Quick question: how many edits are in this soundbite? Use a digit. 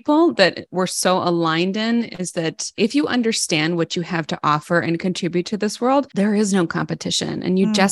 2